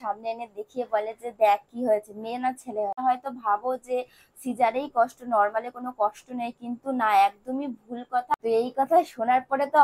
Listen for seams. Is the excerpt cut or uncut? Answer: cut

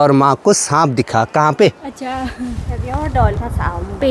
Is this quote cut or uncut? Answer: uncut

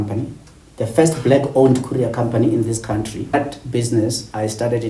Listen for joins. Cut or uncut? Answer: cut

